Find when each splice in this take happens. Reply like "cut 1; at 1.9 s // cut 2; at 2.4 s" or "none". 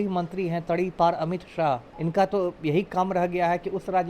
cut 1; at 1.9 s